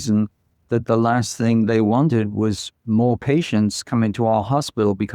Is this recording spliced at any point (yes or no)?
yes